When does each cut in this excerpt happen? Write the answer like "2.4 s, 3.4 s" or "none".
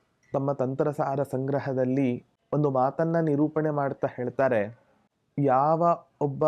2.3 s